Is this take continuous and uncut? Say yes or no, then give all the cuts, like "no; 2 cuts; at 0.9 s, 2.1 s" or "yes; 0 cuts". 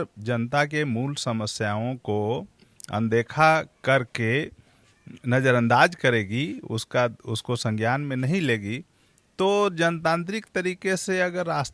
yes; 0 cuts